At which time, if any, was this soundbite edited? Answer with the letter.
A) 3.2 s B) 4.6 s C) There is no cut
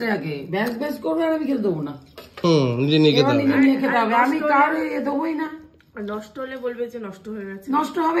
C